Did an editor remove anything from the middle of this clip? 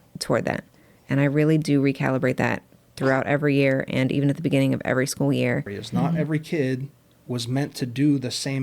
yes; 1 cut; at 5.8 s

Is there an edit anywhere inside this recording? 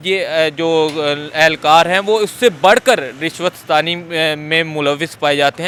no; 0 cuts

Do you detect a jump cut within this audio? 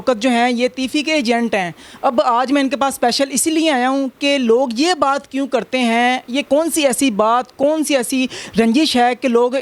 no; 0 cuts

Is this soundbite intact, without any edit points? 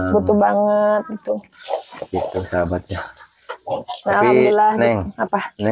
yes; 0 cuts

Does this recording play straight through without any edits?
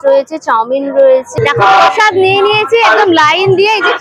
no; 1 cut; at 1.4 s

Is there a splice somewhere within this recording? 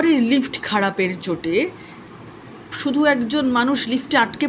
no; 0 cuts

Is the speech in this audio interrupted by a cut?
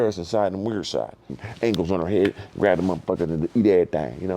yes; 1 cut; at 1.3 s

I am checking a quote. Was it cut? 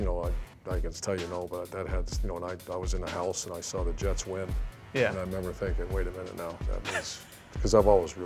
no; 0 cuts

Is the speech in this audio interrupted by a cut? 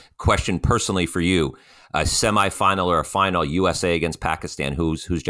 no; 0 cuts

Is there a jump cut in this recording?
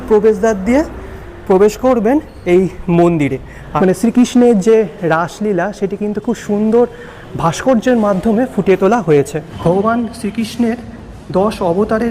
yes; 2 cuts; at 3.6 s, 9.4 s

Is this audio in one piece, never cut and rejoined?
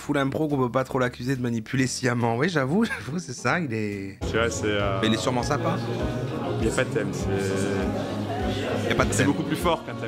no; 1 cut; at 4.2 s

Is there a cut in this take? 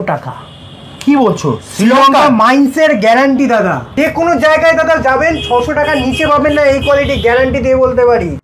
yes; 1 cut; at 3.9 s

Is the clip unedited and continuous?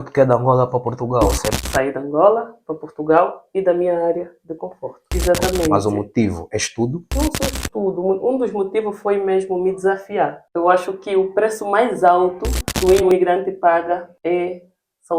no; 2 cuts; at 5.0 s, 10.4 s

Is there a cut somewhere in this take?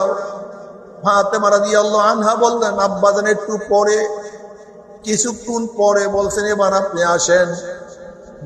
no; 0 cuts

